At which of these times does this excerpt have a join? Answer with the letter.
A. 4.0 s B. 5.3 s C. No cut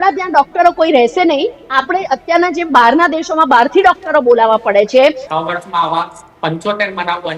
B